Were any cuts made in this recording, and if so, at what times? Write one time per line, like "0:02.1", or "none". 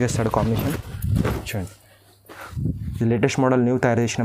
none